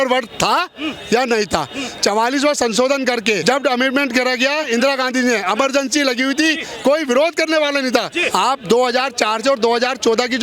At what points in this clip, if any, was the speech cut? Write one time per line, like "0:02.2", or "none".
0:03.4
0:04.6
0:08.2